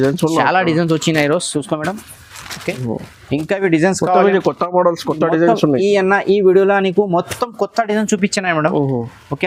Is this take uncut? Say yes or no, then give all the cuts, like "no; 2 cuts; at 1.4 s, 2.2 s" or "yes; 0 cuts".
yes; 0 cuts